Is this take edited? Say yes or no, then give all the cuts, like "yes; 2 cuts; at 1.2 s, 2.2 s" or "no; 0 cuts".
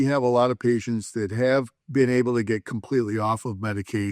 yes; 1 cut; at 1.8 s